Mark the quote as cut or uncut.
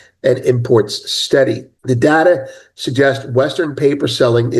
cut